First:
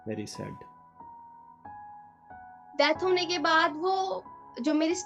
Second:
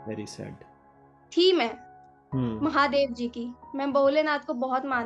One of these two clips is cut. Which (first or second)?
second